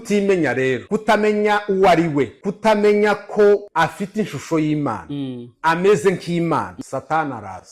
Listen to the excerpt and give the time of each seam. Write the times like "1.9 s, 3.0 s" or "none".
0.8 s, 2.4 s, 3.7 s, 6.7 s